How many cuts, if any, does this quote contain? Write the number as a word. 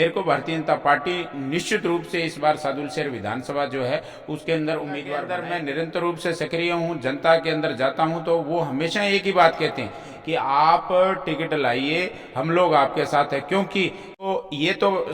two